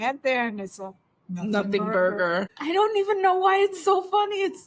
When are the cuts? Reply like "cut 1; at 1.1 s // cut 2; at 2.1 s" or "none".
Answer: cut 1; at 2.5 s